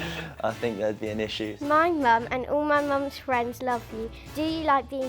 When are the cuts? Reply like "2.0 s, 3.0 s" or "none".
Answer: 1.5 s, 4.2 s